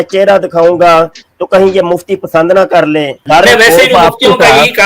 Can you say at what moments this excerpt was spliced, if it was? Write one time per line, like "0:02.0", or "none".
0:03.2

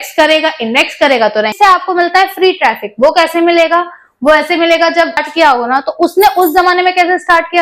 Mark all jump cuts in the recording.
0:01.5
0:05.3

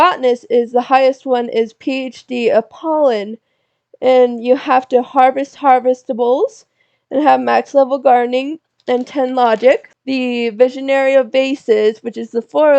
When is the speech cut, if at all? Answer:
0:09.9

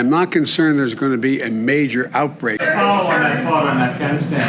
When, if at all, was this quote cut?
0:02.6

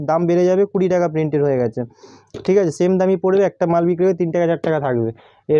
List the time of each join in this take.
none

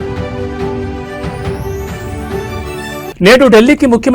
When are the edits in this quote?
none

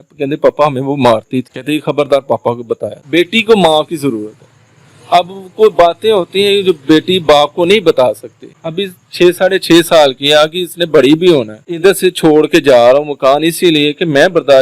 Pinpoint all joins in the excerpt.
0:02.9
0:08.8
0:11.7

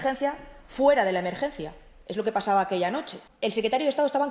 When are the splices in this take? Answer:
0:03.3

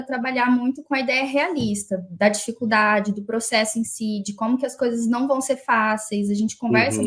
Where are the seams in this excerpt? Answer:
none

